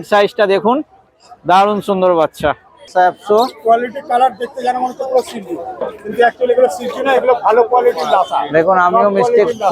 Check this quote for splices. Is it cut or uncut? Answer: cut